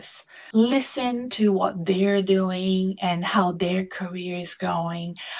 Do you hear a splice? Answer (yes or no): no